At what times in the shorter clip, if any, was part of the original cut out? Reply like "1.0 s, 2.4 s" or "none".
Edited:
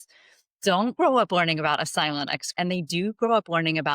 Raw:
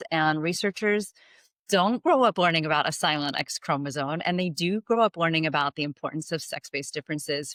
2.5 s